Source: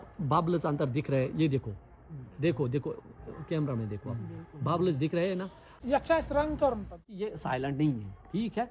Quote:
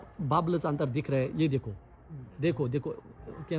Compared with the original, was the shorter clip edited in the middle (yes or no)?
no